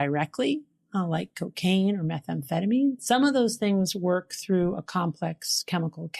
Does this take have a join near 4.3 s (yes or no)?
no